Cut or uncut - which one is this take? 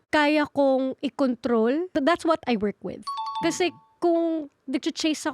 cut